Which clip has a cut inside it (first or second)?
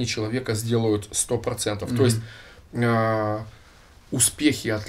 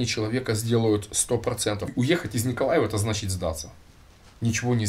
second